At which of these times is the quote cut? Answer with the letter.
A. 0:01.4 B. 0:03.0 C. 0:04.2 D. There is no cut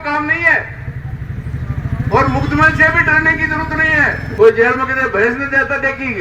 C